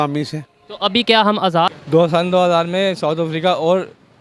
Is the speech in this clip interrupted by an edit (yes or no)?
yes